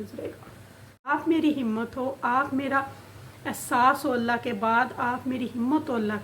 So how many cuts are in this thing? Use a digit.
1